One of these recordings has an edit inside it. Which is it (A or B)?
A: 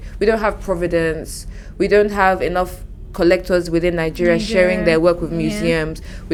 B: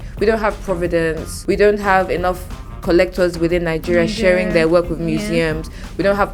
B